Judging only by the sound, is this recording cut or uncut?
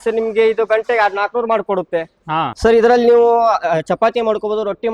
cut